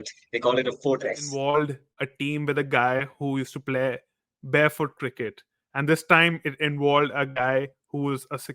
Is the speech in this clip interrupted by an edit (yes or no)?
yes